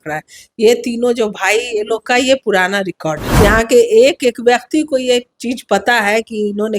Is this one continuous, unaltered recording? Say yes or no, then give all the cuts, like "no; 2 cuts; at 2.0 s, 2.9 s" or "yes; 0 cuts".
no; 1 cut; at 3.2 s